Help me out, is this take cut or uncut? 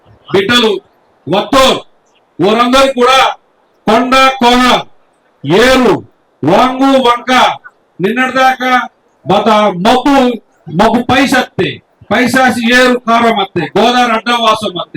uncut